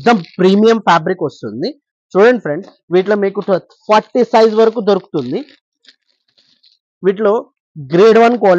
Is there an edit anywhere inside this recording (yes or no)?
no